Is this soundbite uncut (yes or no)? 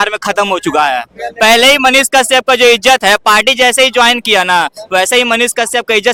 yes